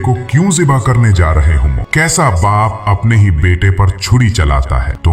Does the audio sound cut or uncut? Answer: uncut